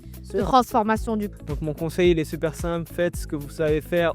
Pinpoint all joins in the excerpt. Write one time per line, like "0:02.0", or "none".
0:01.3